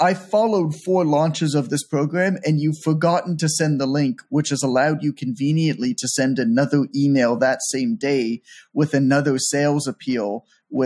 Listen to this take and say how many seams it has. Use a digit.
0